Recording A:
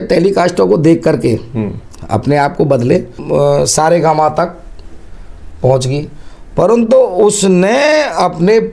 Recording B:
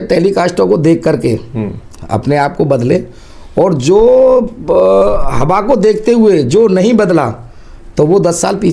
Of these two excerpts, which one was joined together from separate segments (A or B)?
A